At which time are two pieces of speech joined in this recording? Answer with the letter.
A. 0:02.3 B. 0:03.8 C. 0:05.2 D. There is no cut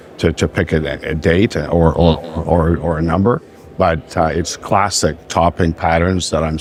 D